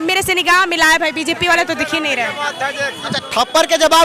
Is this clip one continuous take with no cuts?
yes; 0 cuts

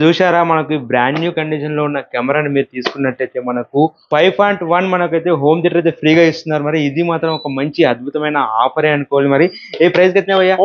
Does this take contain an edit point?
no; 0 cuts

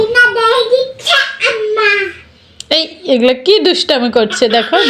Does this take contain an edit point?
no; 0 cuts

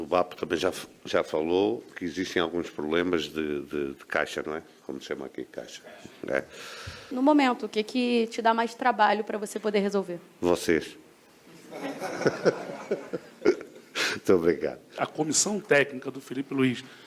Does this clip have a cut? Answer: yes; 2 cuts; at 7.1 s, 15.1 s

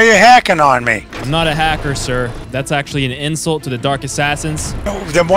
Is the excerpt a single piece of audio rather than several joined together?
no; 1 cut; at 1.1 s

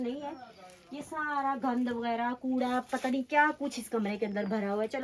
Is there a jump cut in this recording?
no; 0 cuts

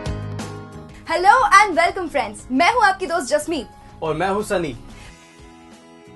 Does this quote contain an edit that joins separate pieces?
yes; 2 cuts; at 0.9 s, 4.8 s

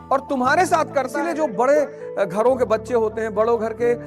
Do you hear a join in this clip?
yes; 1 cut; at 1.1 s

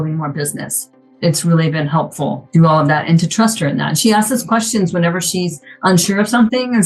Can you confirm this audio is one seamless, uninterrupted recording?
yes; 0 cuts

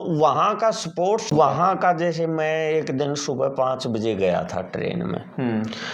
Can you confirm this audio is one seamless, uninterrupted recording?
no; 1 cut; at 1.3 s

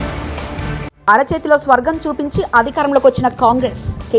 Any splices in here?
no; 0 cuts

